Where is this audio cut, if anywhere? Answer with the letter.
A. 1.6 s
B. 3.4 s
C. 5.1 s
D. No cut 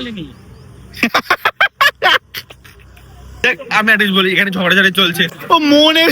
B